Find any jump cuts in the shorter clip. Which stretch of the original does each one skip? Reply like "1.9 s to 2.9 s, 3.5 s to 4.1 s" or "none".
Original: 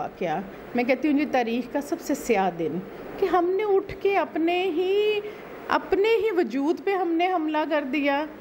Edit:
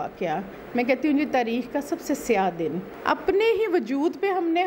2.9 s to 5.5 s

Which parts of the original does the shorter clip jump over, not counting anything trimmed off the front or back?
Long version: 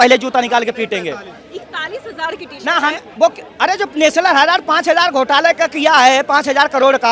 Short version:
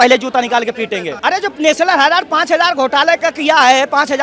1.1 s to 3.5 s

